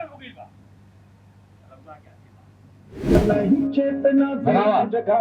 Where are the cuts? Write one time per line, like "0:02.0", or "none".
0:03.1